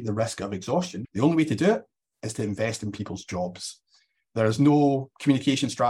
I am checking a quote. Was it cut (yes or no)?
yes